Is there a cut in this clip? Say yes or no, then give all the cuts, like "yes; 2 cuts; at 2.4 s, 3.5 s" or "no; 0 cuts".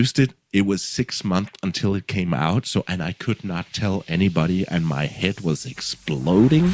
no; 0 cuts